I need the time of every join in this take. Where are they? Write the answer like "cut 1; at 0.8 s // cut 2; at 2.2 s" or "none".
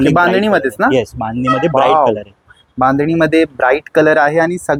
none